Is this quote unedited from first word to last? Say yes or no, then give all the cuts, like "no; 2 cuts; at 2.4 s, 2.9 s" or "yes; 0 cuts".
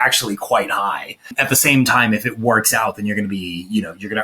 no; 1 cut; at 1.4 s